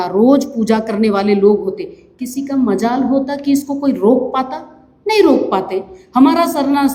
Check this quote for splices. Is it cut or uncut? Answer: uncut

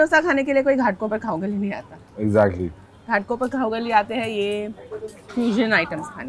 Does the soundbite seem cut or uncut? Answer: uncut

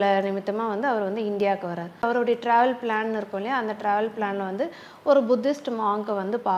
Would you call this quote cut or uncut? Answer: cut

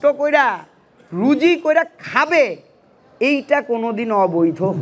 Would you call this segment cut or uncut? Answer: uncut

